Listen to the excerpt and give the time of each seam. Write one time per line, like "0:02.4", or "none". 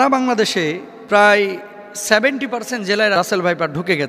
0:00.9
0:03.1